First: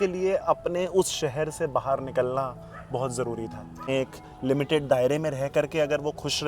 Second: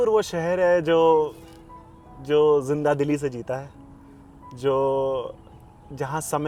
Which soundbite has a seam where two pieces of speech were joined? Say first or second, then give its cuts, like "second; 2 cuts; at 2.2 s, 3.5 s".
first; 1 cut; at 3.9 s